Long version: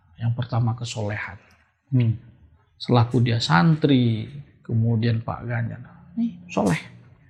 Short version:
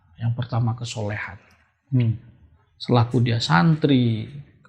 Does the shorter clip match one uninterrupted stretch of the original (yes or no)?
yes